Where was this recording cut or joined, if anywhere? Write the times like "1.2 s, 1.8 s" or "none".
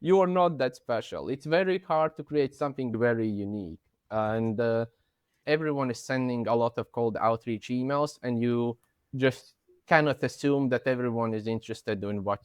5.4 s